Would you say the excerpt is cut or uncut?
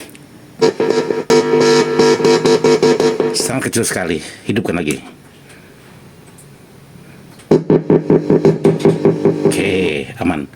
cut